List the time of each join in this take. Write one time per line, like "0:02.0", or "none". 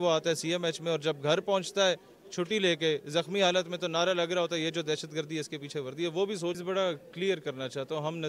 0:06.6